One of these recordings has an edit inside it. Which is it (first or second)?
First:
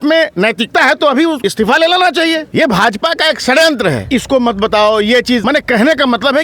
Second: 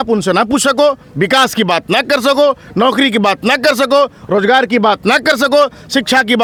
first